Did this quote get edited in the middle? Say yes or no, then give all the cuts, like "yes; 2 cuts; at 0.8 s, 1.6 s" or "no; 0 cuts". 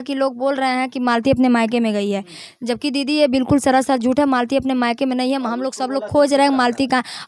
no; 0 cuts